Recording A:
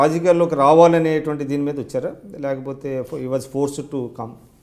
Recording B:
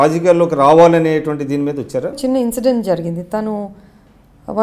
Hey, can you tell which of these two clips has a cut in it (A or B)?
B